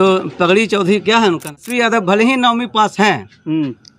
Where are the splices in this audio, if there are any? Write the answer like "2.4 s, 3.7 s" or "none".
1.6 s